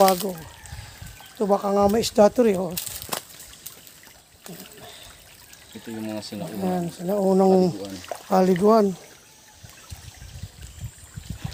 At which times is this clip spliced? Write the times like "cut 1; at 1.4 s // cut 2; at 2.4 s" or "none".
none